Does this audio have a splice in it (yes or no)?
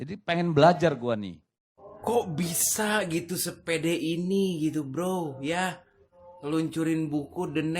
yes